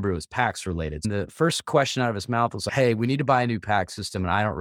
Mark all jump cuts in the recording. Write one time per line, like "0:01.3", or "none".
0:01.0